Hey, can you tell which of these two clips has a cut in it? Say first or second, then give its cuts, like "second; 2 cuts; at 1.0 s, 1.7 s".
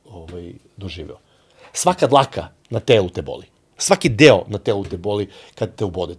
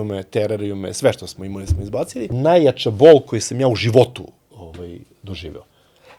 second; 1 cut; at 2.2 s